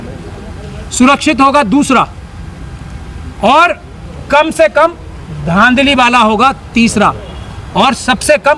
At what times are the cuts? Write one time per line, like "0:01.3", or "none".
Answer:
none